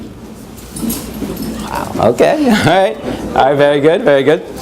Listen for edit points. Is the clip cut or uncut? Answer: cut